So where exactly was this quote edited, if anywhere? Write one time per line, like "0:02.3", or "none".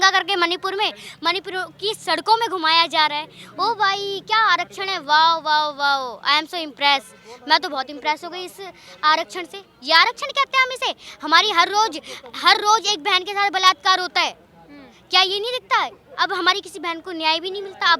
none